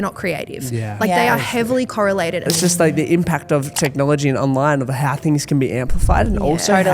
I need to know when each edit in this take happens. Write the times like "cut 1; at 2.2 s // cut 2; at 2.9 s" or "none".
cut 1; at 2.5 s // cut 2; at 3.7 s